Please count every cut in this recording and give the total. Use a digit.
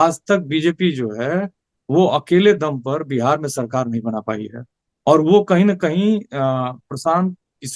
0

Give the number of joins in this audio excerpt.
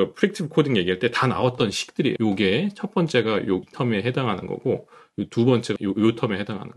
3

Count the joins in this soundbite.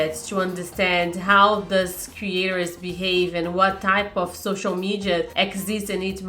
1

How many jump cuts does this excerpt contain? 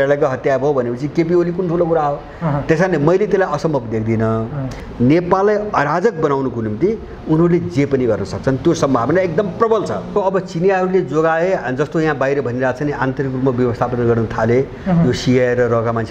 2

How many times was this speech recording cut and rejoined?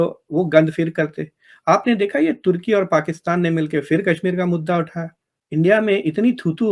0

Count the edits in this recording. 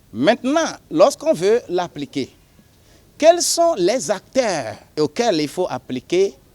1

